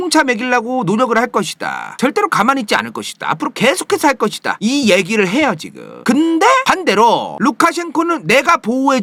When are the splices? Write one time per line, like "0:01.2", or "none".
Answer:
none